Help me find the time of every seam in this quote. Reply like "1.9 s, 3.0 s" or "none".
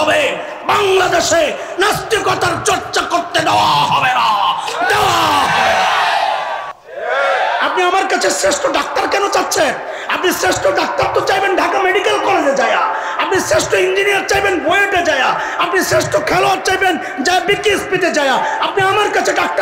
6.8 s